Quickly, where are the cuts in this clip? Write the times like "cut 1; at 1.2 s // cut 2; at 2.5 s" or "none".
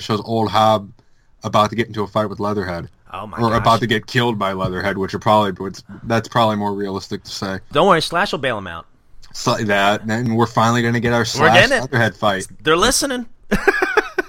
none